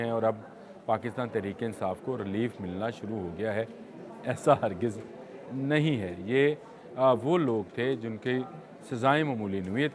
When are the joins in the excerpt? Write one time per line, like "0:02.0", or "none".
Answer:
none

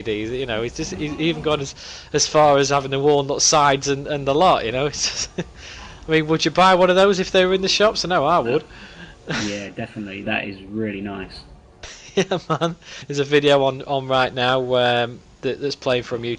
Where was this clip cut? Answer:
none

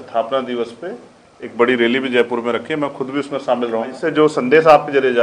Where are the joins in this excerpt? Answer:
0:04.0

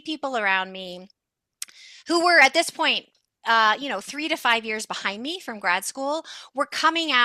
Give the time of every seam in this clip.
none

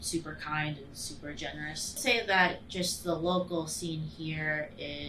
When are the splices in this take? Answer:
0:02.0

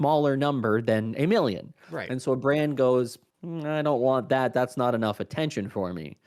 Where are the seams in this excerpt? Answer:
none

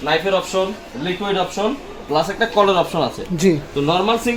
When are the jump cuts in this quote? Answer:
none

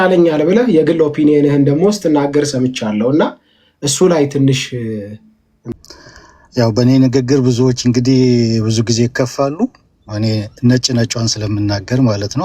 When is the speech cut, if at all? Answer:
0:05.7

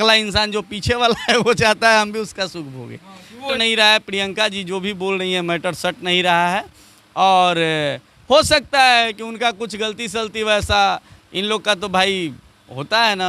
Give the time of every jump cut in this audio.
0:03.5

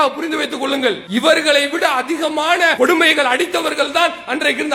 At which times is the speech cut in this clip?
0:01.0
0:02.7

